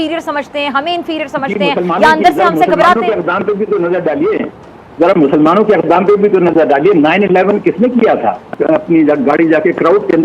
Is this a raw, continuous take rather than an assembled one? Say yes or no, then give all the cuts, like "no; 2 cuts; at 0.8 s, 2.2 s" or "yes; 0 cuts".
no; 1 cut; at 8.5 s